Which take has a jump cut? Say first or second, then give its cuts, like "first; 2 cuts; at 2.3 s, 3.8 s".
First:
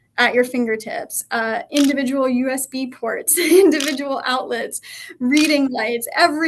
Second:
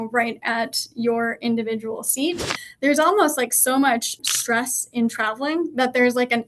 second; 2 cuts; at 2.6 s, 4.2 s